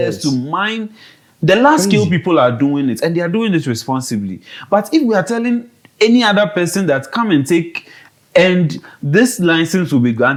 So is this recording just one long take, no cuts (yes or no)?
yes